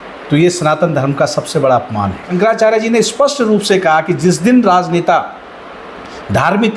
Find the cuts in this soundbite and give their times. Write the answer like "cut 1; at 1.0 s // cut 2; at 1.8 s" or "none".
cut 1; at 2.2 s